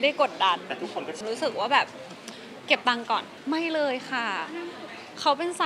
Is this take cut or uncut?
cut